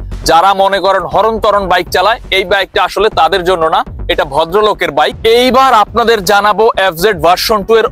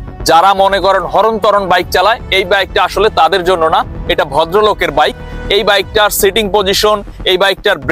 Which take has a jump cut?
first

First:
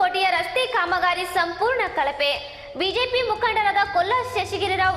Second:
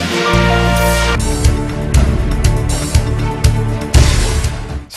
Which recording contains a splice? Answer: second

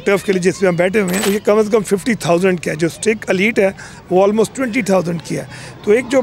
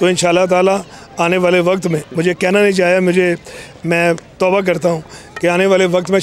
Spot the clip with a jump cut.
first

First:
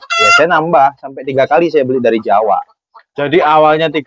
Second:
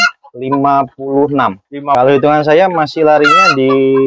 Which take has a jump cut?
second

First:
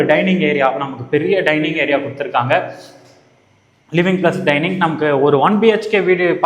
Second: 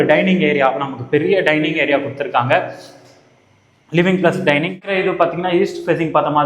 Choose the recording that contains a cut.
second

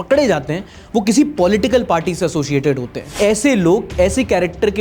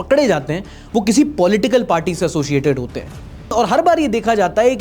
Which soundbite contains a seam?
first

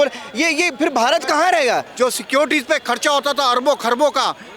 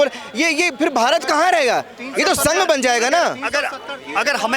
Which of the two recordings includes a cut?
first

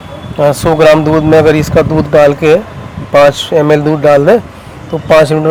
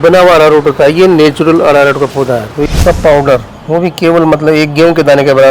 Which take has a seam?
second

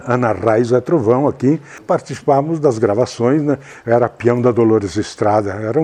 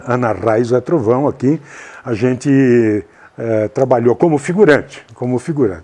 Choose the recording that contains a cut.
first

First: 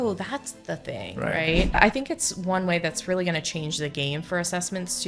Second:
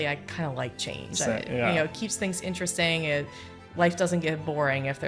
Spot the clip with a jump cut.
first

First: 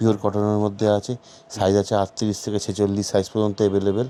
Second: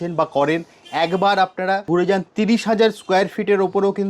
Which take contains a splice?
second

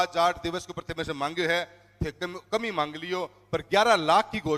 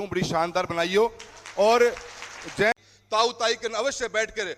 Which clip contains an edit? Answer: second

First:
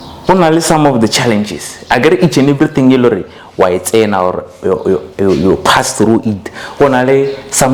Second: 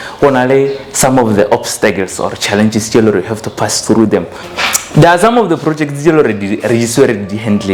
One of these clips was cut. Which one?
second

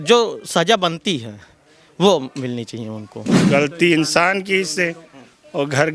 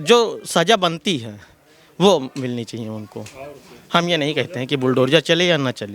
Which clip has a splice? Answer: first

